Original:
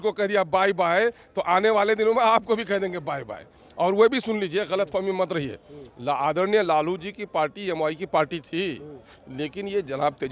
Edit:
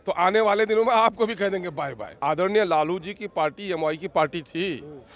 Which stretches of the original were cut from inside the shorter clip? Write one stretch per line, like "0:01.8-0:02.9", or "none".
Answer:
0:03.5-0:06.2